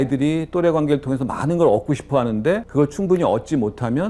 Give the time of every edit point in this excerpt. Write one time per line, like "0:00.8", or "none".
0:02.7